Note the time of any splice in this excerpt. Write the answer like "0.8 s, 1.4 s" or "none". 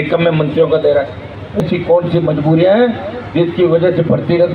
1.6 s

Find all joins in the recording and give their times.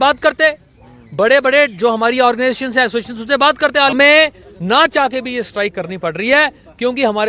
3.9 s

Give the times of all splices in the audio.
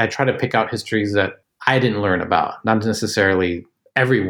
1.4 s

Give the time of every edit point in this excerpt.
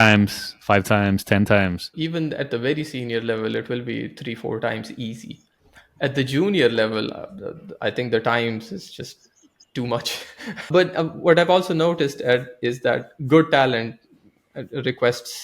1.9 s, 10.6 s

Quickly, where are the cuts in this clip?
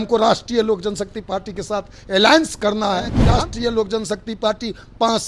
3.2 s

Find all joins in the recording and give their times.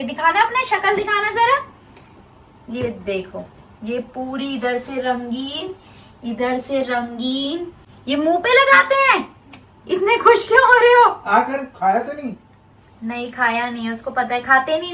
none

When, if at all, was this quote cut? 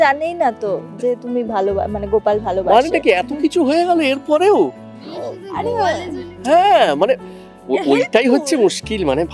none

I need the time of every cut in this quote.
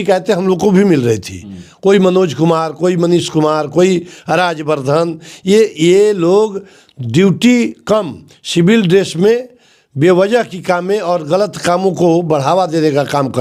none

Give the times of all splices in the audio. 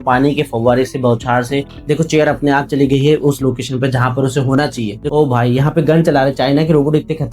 1.7 s, 5.0 s

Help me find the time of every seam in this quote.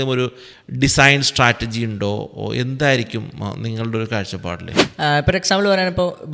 4.8 s

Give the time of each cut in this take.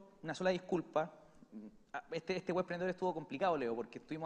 3.2 s

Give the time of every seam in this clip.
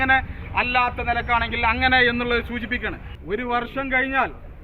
3.1 s

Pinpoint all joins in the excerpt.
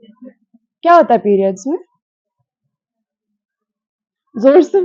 none

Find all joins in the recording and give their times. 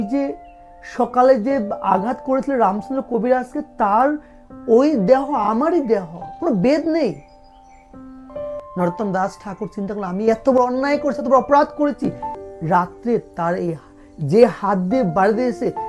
8.6 s, 12.2 s

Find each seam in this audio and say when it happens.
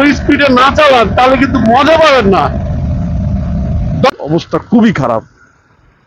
4.2 s

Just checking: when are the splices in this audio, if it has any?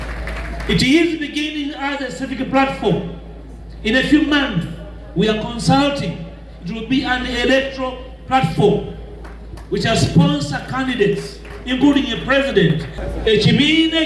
12.9 s

